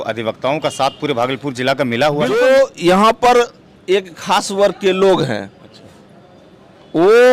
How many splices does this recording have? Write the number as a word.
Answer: one